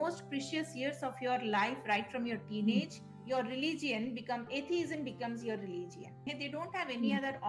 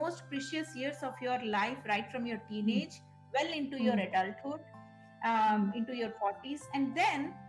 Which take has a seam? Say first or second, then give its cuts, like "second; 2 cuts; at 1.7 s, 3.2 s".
first; 2 cuts; at 3.2 s, 6.3 s